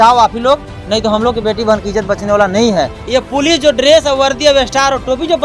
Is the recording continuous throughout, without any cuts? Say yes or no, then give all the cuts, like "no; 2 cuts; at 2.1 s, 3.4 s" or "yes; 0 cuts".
no; 1 cut; at 3.0 s